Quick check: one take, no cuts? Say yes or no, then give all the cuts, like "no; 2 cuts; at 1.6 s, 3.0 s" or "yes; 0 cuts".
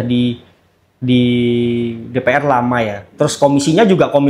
yes; 0 cuts